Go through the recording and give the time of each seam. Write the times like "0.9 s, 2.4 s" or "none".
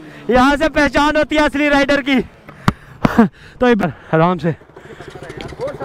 3.8 s

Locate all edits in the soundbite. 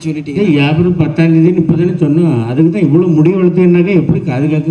none

